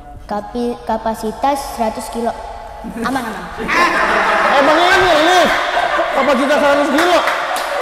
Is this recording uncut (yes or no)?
yes